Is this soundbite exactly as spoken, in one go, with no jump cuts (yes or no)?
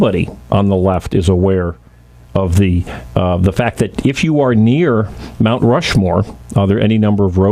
no